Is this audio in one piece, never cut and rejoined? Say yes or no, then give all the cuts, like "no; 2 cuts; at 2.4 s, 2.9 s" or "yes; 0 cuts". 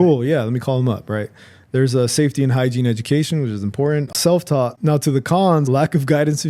no; 2 cuts; at 4.1 s, 5.6 s